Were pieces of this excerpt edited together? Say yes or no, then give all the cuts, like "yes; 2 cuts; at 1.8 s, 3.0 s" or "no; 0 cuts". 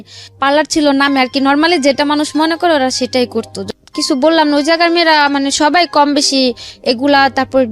yes; 1 cut; at 3.6 s